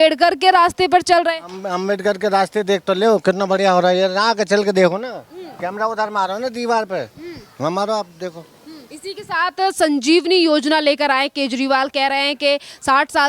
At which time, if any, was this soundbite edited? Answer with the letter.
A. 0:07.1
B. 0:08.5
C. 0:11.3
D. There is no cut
D